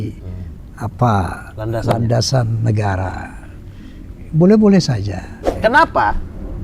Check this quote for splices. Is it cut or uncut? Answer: cut